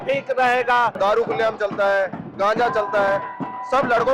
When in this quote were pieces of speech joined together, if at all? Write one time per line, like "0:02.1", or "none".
0:00.9